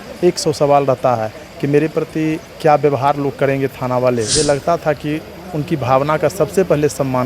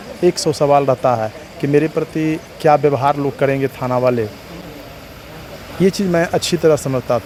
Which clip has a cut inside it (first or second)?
first